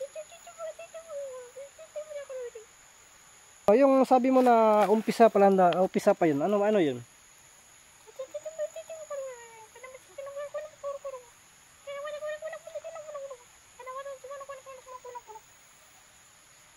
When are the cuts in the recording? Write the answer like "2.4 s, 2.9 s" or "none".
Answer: 3.7 s